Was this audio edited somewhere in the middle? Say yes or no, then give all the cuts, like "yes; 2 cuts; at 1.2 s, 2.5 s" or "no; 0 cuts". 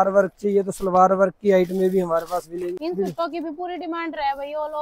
yes; 1 cut; at 2.8 s